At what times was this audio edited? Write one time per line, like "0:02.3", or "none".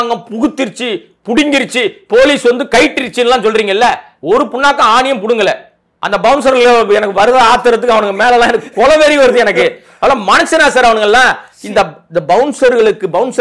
0:05.9